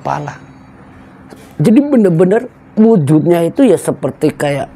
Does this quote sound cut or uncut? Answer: uncut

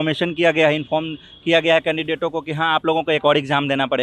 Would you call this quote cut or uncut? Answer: uncut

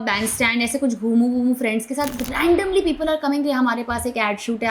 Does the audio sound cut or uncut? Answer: uncut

